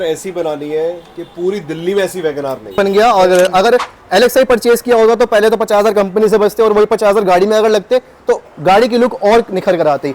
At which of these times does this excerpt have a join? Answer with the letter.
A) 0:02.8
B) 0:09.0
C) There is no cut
A